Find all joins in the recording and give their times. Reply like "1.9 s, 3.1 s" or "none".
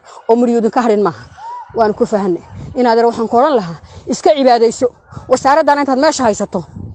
none